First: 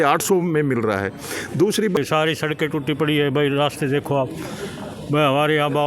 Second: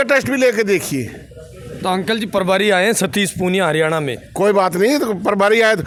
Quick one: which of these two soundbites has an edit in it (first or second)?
first